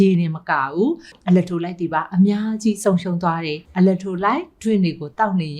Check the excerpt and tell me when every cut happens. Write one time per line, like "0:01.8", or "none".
0:01.1
0:03.6